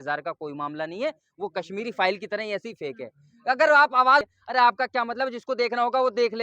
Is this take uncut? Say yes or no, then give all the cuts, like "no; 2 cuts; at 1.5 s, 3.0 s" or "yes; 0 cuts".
no; 1 cut; at 4.2 s